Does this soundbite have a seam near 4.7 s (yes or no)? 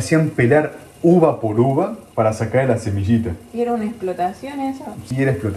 no